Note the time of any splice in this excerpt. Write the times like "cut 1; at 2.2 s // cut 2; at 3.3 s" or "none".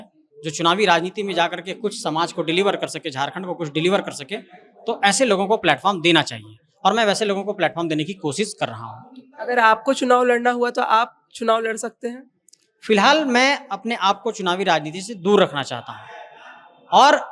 none